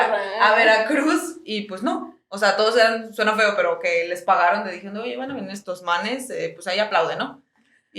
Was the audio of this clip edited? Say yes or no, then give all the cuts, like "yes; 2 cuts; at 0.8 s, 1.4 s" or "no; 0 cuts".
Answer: no; 0 cuts